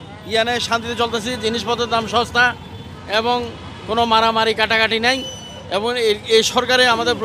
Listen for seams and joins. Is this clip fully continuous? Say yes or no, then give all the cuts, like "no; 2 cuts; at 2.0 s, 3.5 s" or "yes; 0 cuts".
yes; 0 cuts